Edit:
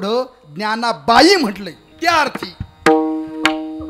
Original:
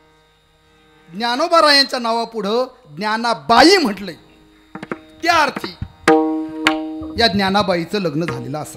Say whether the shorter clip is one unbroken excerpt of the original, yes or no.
no